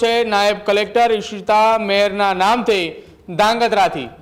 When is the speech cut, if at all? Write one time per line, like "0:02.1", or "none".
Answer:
none